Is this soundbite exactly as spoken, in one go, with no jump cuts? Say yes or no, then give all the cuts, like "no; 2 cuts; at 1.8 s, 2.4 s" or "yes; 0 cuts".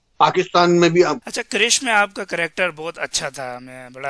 no; 1 cut; at 1.2 s